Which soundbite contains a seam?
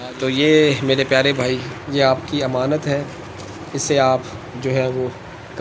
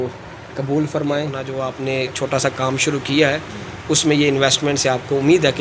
second; 1 cut; at 1.5 s

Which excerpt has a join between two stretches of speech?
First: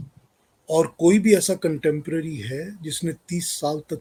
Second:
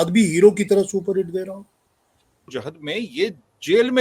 second; 1 cut; at 2.5 s

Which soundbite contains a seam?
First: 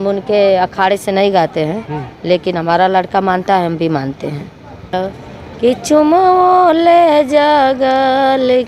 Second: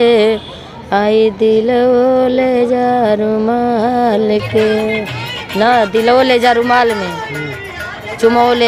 first; 1 cut; at 4.9 s

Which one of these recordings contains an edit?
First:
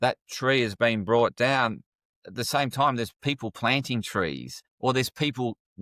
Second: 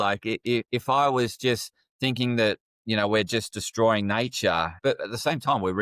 second; 1 cut; at 4.7 s

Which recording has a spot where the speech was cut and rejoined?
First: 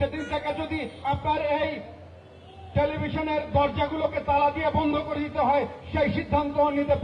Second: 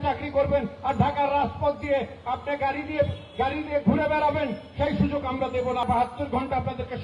second; 1 cut; at 5.8 s

